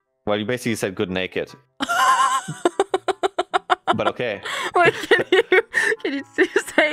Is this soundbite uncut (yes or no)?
yes